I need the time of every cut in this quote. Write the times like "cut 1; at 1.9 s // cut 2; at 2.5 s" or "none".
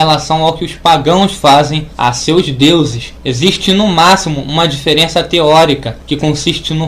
cut 1; at 3.6 s